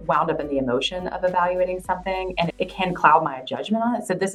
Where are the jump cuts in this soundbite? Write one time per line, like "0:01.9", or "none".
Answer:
0:02.5